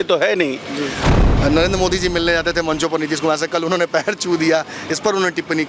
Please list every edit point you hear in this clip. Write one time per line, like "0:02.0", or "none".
0:01.1